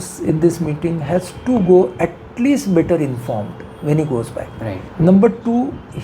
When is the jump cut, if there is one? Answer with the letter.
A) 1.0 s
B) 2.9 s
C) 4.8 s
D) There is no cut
C